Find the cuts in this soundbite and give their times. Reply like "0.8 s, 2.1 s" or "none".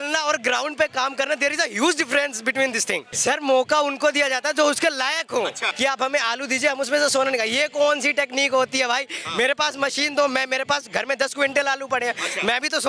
3.1 s, 5.6 s